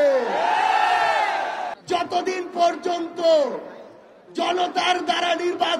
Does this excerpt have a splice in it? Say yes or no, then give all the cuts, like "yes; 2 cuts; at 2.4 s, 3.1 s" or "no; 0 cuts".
yes; 1 cut; at 1.7 s